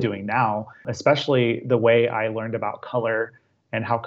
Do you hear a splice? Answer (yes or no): no